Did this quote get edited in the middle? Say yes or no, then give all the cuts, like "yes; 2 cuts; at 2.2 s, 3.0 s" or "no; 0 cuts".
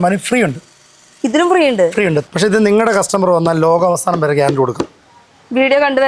yes; 1 cut; at 2.2 s